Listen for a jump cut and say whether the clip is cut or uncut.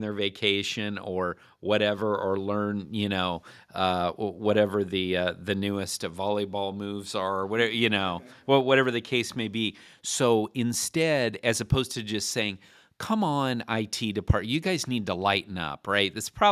uncut